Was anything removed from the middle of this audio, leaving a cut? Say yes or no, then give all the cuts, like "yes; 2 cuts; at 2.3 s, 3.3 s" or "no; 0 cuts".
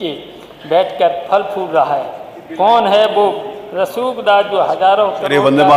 no; 0 cuts